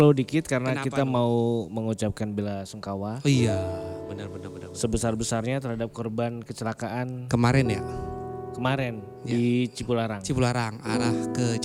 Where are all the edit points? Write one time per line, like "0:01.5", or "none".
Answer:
none